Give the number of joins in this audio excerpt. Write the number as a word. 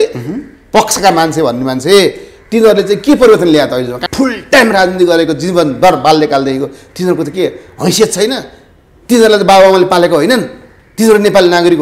one